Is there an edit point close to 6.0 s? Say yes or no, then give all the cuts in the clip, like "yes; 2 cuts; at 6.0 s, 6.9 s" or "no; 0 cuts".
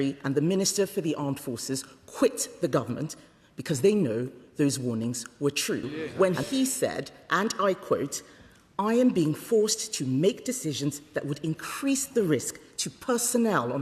yes; 1 cut; at 6.0 s